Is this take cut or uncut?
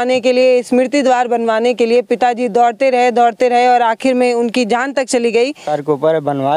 cut